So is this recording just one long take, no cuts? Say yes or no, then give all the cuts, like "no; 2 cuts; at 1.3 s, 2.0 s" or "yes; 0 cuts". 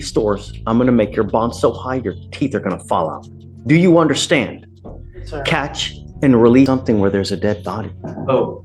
no; 1 cut; at 6.7 s